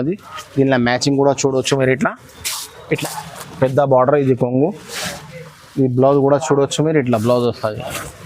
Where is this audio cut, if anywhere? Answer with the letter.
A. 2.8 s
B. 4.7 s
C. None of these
A